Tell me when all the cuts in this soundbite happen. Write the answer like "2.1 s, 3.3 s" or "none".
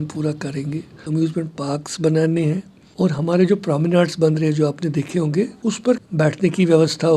1.0 s, 2.8 s, 5.5 s